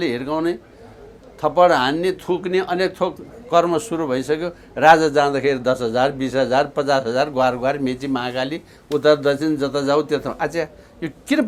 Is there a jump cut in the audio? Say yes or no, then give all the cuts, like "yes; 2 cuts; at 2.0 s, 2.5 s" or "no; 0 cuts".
no; 0 cuts